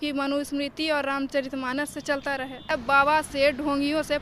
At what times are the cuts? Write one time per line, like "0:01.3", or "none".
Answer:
0:02.7